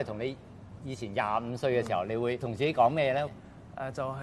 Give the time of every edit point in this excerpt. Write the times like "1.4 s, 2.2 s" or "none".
2.5 s